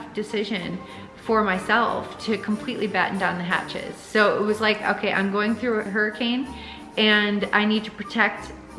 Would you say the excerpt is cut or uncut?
uncut